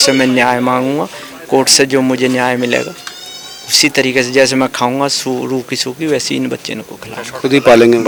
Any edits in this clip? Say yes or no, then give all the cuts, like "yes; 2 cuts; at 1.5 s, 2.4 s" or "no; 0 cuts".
no; 0 cuts